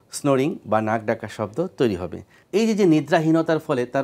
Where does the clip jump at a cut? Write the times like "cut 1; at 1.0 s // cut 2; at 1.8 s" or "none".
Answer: cut 1; at 2.4 s

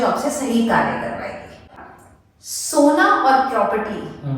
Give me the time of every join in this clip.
cut 1; at 1.7 s

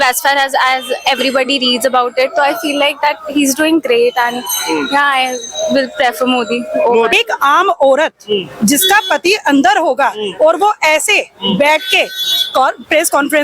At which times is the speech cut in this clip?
cut 1; at 7.1 s

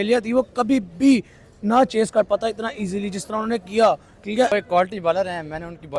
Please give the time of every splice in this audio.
cut 1; at 4.5 s

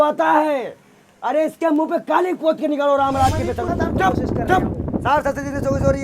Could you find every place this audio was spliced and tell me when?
cut 1; at 3.7 s

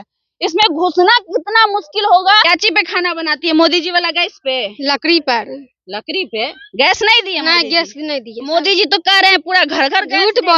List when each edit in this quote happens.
cut 1; at 2.4 s // cut 2; at 8.3 s

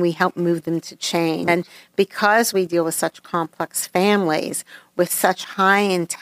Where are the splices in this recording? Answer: cut 1; at 1.5 s

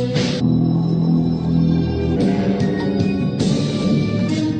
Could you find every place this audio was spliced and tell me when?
none

